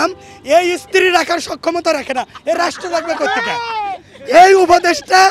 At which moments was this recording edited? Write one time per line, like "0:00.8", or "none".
none